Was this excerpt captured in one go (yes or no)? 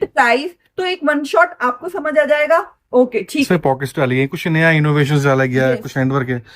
no